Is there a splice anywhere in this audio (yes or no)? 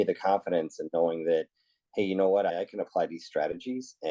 yes